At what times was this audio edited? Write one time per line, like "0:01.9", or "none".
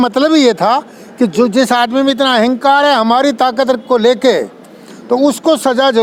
none